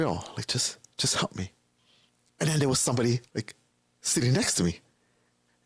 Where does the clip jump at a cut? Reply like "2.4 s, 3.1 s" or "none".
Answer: 3.3 s